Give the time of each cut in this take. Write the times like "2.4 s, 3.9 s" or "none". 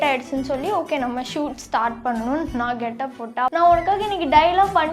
3.5 s